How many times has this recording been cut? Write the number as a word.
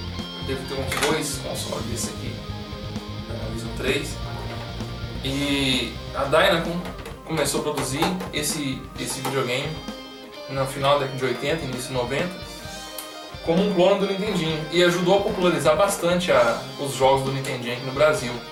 zero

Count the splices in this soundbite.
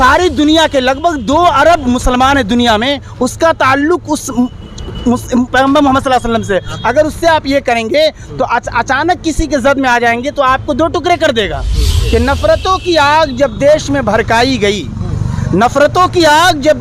one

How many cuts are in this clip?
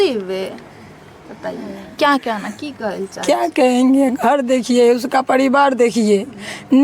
zero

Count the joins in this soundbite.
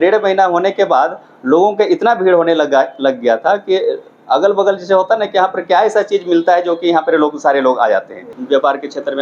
one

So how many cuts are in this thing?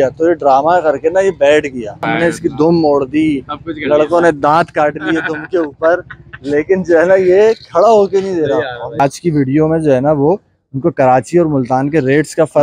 two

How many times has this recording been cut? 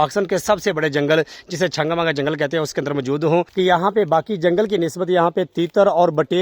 one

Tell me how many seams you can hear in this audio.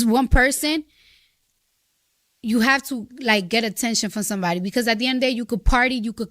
one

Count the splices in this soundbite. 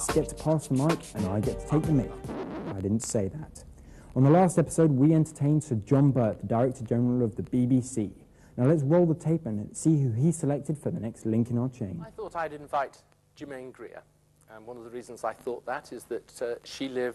one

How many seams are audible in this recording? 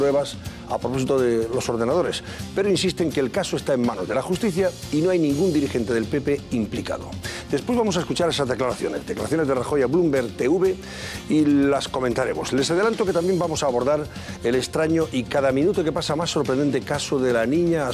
one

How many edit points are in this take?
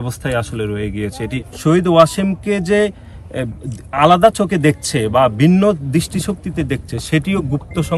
one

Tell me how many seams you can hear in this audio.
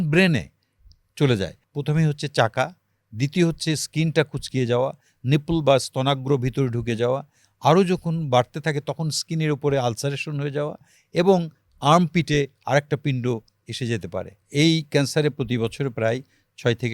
two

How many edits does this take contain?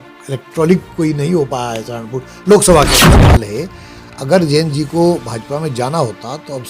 one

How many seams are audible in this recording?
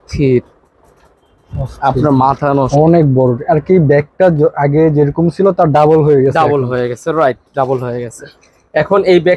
one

